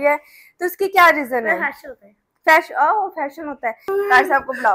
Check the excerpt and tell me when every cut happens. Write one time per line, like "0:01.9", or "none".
0:03.8